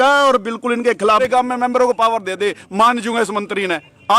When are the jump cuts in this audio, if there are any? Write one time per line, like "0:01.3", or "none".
0:01.2